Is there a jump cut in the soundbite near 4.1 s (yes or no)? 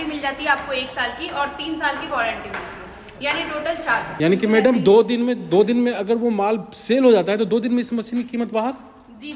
yes